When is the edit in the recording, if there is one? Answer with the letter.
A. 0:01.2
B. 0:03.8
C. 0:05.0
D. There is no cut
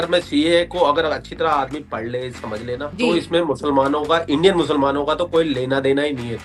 D